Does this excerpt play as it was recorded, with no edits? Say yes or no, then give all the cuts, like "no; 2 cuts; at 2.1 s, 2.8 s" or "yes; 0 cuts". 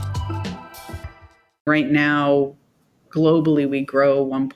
no; 1 cut; at 1.7 s